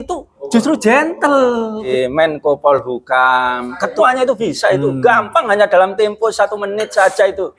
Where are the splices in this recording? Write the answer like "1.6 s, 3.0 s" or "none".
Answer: 1.9 s, 3.9 s